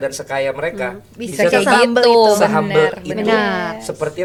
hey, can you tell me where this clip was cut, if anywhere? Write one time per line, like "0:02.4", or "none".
none